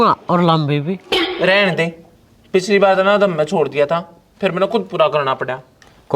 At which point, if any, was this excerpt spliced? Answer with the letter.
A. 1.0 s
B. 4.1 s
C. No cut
A